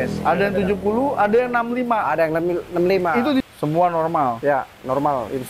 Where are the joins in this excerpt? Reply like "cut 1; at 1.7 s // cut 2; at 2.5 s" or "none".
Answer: cut 1; at 3.4 s